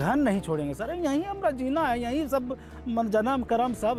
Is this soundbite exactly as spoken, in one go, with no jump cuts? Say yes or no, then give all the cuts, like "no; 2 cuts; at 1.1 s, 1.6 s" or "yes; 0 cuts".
yes; 0 cuts